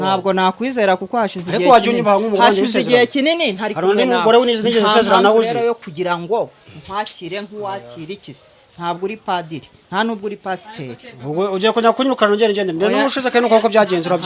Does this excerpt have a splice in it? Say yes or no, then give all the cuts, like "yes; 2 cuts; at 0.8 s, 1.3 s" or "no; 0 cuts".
no; 0 cuts